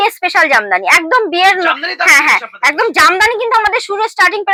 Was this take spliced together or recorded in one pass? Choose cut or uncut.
uncut